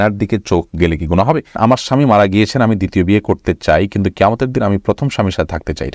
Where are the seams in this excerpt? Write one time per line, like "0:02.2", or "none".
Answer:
0:01.6